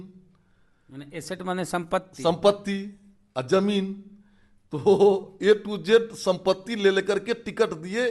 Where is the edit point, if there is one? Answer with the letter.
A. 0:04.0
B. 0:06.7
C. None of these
C